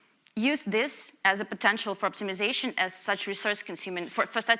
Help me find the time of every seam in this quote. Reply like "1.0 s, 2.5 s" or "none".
none